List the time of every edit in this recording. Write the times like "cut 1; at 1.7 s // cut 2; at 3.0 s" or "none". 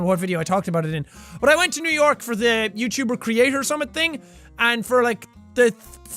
cut 1; at 4.8 s

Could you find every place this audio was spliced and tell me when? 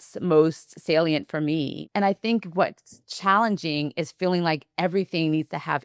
cut 1; at 1.8 s

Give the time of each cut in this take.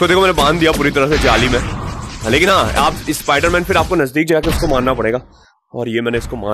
none

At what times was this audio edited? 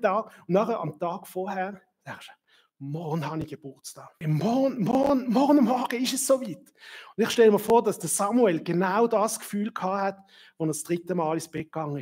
cut 1; at 4.1 s

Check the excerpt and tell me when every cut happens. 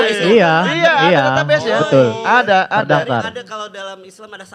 none

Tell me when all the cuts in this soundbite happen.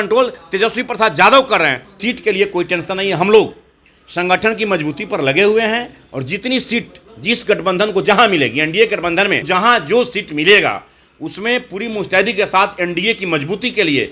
cut 1; at 1.9 s // cut 2; at 9.5 s

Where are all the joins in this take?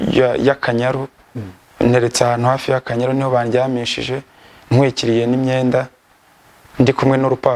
none

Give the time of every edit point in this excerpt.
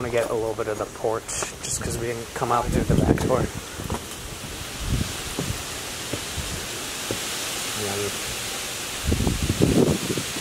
none

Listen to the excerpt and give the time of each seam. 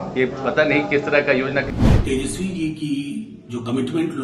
cut 1; at 1.7 s

